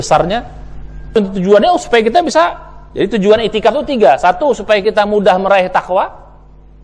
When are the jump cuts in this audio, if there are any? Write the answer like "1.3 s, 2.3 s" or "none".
1.1 s